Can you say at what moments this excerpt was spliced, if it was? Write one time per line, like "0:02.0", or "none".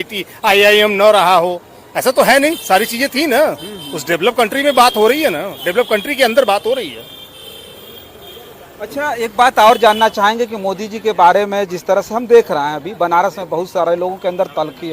none